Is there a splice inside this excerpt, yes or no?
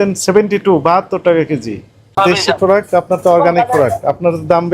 yes